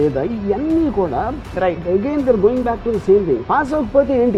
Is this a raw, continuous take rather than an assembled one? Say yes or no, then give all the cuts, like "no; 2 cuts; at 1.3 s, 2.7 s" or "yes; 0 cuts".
yes; 0 cuts